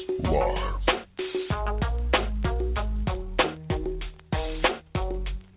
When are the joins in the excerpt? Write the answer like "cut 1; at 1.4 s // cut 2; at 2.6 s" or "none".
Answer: none

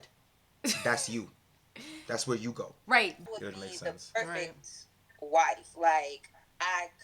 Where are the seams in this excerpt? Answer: cut 1; at 3.3 s

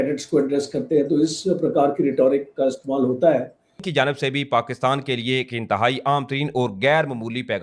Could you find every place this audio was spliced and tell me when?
cut 1; at 3.7 s

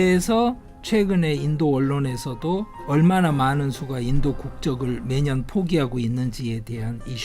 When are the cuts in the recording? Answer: cut 1; at 2.8 s

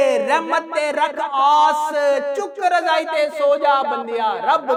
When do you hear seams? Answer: none

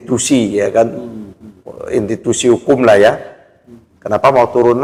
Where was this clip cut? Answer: none

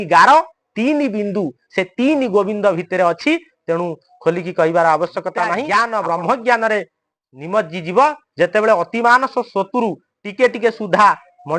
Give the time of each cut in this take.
cut 1; at 5.6 s

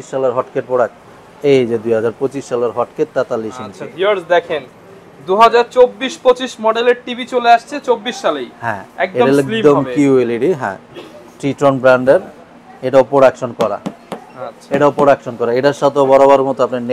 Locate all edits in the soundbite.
none

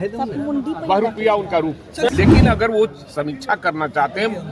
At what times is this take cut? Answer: cut 1; at 2.1 s

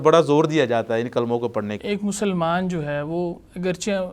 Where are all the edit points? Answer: cut 1; at 1.7 s

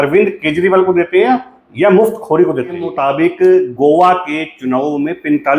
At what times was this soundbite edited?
cut 1; at 2.9 s

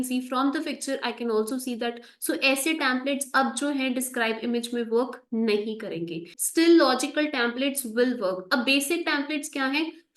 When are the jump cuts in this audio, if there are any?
cut 1; at 6.3 s

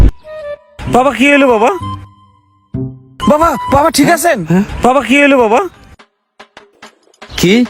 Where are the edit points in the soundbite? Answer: none

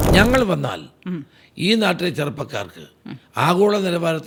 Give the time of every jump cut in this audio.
none

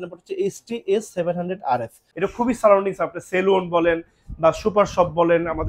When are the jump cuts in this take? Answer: cut 1; at 2.0 s

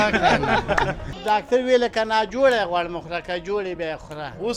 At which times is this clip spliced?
cut 1; at 1.1 s

